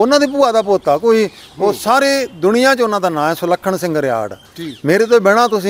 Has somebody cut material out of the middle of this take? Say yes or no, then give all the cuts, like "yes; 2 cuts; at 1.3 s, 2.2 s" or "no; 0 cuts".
no; 0 cuts